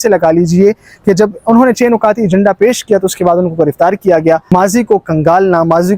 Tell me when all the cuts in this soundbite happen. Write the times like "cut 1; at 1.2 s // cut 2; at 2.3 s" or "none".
cut 1; at 4.4 s